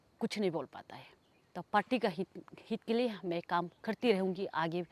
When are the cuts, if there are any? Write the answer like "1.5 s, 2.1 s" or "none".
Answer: none